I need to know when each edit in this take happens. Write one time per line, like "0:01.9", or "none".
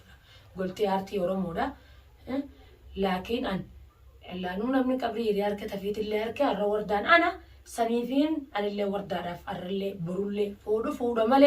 0:10.6

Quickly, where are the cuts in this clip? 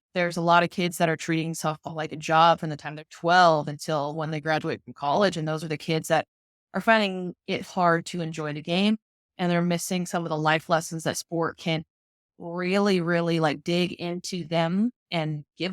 none

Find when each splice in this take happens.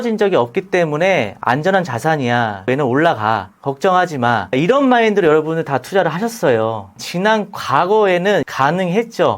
0:02.7
0:04.5
0:07.0
0:08.5

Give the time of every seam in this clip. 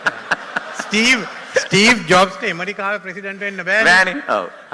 none

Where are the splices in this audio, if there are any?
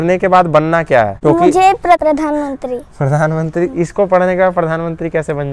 0:01.1
0:02.0

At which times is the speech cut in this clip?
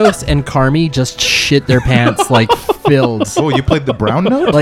none

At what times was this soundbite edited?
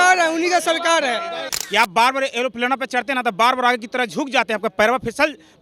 0:01.5

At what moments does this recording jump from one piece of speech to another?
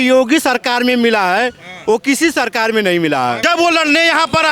0:03.4

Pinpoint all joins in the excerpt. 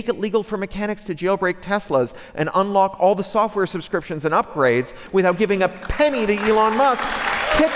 none

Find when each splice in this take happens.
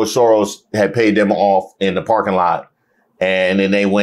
none

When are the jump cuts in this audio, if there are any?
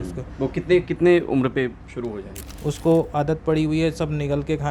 0:02.3

